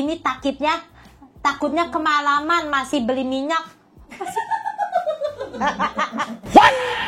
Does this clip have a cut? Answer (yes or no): no